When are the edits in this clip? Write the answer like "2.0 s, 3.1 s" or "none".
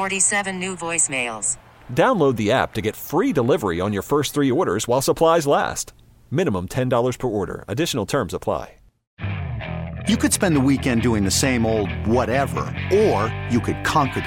9.0 s